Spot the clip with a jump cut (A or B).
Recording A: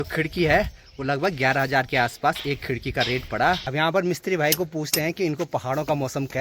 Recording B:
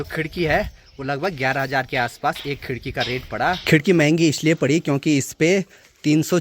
A